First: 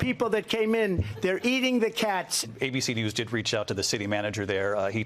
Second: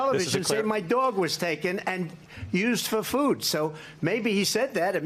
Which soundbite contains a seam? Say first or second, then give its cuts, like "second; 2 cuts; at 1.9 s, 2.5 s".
first; 1 cut; at 2.4 s